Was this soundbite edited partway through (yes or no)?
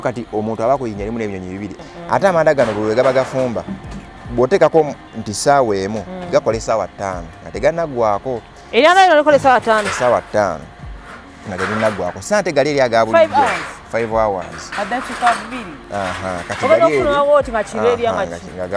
yes